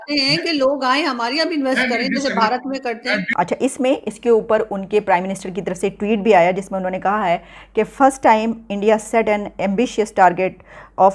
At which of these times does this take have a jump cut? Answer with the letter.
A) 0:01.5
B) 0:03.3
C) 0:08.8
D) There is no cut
B